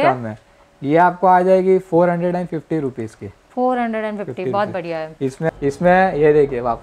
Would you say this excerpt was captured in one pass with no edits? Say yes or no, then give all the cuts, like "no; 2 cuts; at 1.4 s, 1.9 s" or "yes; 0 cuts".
no; 1 cut; at 5.5 s